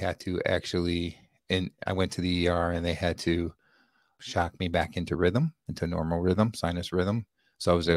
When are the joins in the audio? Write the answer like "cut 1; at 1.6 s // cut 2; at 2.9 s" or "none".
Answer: cut 1; at 4.2 s

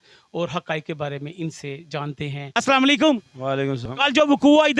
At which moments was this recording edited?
cut 1; at 2.6 s // cut 2; at 3.9 s

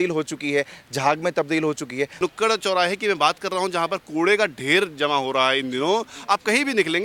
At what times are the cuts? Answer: cut 1; at 2.1 s

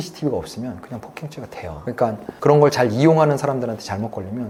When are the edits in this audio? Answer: none

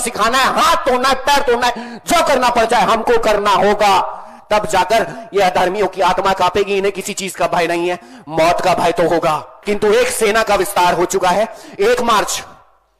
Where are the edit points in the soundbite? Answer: none

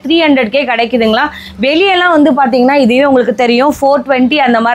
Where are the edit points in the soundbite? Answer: none

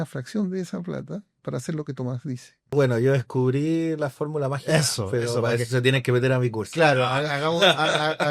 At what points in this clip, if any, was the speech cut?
cut 1; at 2.7 s

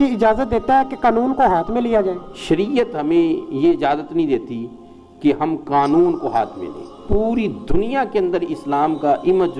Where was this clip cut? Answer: cut 1; at 2.3 s // cut 2; at 7.0 s

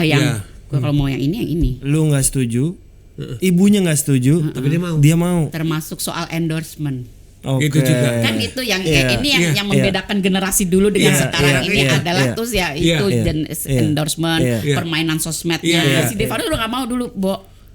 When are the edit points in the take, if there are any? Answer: cut 1; at 1.8 s // cut 2; at 5.5 s // cut 3; at 16.1 s

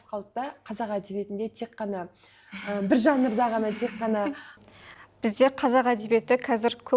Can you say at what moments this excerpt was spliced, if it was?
cut 1; at 4.5 s

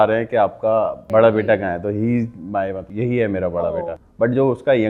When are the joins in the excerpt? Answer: cut 1; at 1.0 s // cut 2; at 2.9 s // cut 3; at 4.0 s

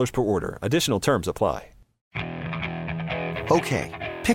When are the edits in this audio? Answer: cut 1; at 2.0 s

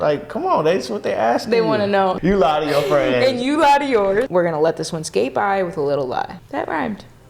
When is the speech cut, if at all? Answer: cut 1; at 2.2 s // cut 2; at 4.3 s // cut 3; at 6.4 s

